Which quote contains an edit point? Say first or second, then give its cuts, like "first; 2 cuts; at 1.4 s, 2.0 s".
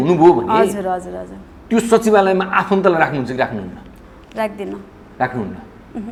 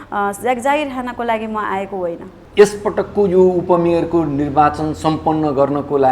second; 1 cut; at 2.3 s